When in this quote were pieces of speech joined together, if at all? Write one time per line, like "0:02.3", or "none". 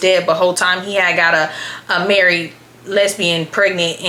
none